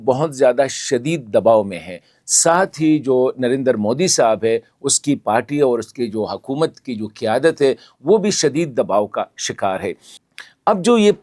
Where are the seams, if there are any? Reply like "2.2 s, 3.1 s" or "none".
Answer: 10.1 s